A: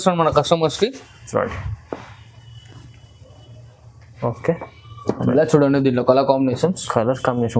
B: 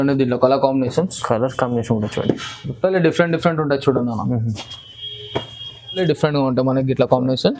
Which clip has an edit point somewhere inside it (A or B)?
B